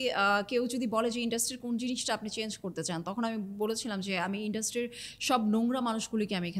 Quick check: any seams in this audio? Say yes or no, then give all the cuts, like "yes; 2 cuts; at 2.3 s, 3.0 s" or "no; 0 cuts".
no; 0 cuts